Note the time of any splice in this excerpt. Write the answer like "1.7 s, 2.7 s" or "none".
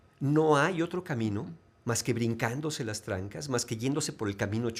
none

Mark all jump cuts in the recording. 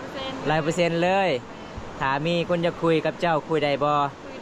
none

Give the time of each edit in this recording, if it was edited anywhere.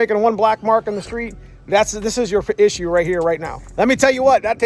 3.6 s

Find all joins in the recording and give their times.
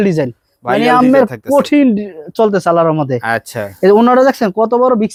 none

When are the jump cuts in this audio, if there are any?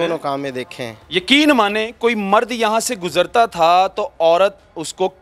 none

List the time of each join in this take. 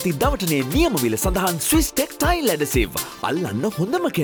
none

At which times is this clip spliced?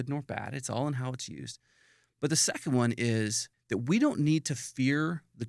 3.5 s

